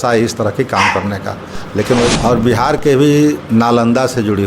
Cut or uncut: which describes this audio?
cut